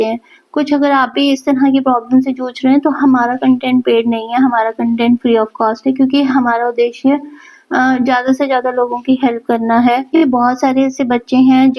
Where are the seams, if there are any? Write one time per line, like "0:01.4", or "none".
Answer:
0:10.1